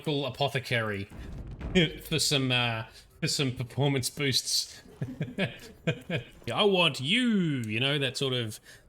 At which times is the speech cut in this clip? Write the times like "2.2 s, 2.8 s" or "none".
6.5 s